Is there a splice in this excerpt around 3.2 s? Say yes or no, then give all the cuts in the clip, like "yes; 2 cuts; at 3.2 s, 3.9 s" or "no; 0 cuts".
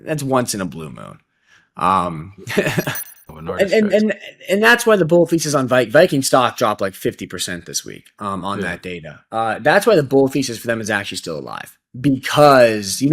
yes; 1 cut; at 3.2 s